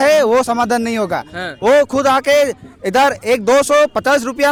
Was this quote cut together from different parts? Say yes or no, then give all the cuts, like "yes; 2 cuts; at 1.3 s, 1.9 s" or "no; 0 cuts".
no; 0 cuts